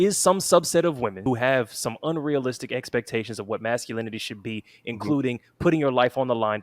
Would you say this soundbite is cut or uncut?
cut